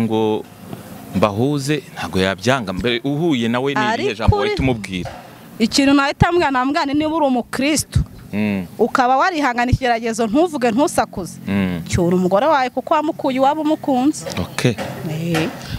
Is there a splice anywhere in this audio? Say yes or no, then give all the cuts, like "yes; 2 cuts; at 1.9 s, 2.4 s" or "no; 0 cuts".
no; 0 cuts